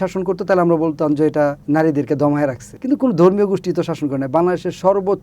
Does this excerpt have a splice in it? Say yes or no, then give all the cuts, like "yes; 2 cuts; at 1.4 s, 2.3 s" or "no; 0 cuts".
yes; 2 cuts; at 1.6 s, 2.7 s